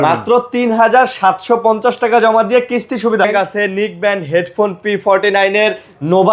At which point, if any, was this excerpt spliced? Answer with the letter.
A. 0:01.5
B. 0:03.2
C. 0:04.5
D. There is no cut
B